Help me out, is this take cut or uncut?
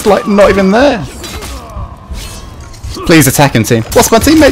cut